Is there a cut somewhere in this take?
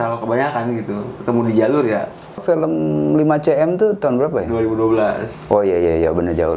yes; 1 cut; at 2.4 s

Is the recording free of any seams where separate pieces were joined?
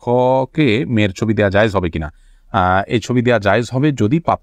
yes; 0 cuts

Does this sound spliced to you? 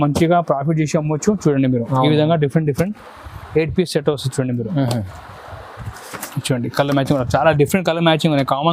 no; 0 cuts

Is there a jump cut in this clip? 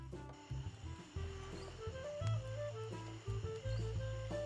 no; 0 cuts

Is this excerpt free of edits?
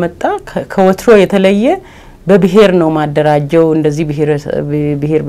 yes; 0 cuts

